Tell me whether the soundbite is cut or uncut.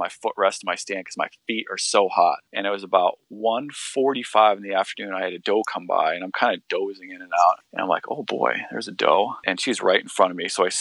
cut